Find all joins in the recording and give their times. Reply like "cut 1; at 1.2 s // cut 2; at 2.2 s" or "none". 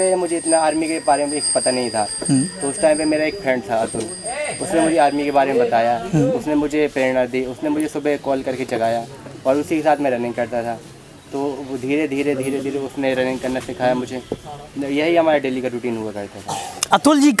none